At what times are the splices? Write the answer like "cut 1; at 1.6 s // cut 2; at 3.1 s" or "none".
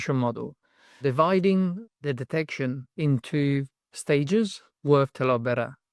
cut 1; at 1.0 s // cut 2; at 1.8 s